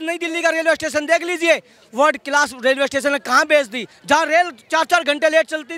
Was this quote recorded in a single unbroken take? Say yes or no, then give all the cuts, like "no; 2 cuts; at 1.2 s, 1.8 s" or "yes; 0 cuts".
yes; 0 cuts